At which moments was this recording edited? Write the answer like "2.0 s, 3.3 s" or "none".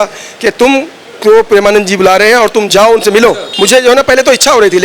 3.5 s